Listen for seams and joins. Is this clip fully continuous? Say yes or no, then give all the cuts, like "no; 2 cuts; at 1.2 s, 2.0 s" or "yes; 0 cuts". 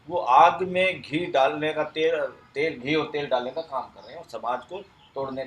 yes; 0 cuts